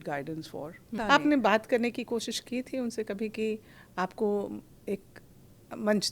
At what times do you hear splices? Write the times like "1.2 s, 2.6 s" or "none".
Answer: 1.0 s